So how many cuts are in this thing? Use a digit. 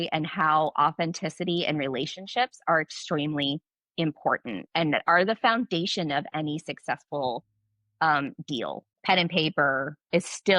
1